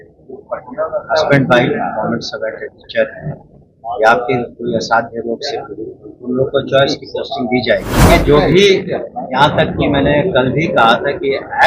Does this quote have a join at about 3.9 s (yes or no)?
no